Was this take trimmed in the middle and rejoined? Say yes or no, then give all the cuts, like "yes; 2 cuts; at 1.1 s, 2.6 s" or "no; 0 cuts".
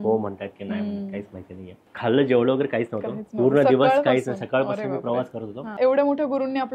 yes; 2 cuts; at 1.9 s, 5.8 s